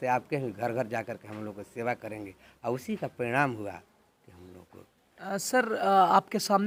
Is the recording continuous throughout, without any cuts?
yes; 0 cuts

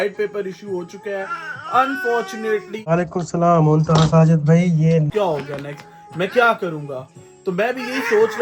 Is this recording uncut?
no; 2 cuts; at 2.9 s, 5.1 s

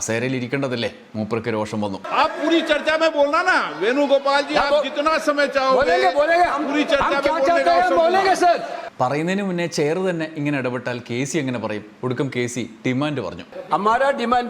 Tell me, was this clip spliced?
no; 0 cuts

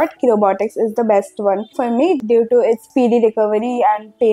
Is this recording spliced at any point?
no; 0 cuts

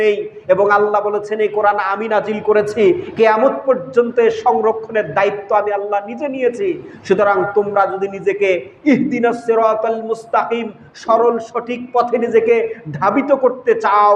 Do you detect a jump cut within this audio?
no; 0 cuts

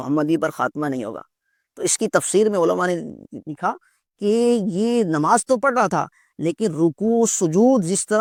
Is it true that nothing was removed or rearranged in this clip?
yes; 0 cuts

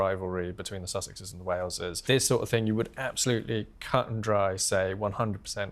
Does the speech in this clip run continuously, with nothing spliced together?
no; 1 cut; at 2.0 s

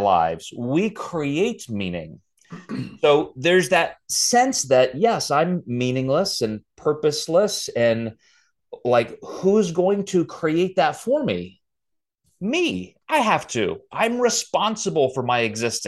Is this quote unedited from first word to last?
yes; 0 cuts

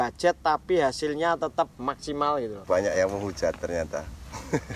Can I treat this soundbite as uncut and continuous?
no; 1 cut; at 2.6 s

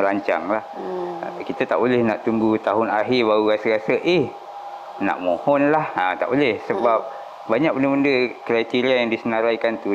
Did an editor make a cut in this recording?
no; 0 cuts

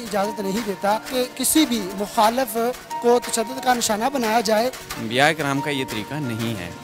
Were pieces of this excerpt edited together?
yes; 2 cuts; at 1.1 s, 4.9 s

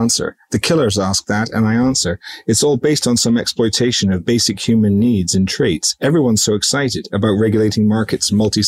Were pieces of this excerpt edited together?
no; 0 cuts

